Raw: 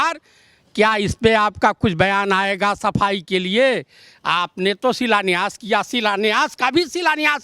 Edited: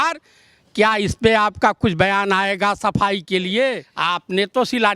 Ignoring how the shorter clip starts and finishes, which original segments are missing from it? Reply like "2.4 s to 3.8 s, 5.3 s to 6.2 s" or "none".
3.9 s to 4.2 s